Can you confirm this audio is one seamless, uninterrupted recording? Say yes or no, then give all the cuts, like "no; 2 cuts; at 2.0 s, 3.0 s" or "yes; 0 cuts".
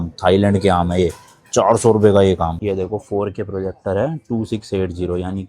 no; 1 cut; at 2.5 s